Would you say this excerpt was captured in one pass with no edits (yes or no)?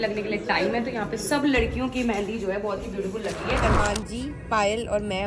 no